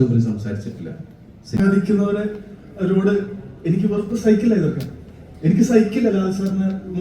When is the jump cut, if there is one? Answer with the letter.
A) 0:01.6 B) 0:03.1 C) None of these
A